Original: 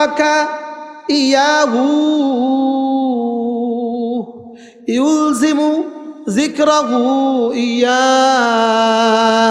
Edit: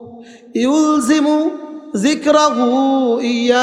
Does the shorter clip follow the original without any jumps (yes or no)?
yes